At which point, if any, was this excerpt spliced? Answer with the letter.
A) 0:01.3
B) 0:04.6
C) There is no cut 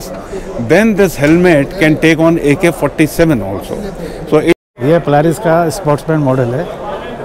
B